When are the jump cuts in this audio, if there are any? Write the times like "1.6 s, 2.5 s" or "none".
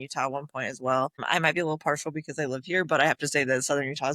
1.2 s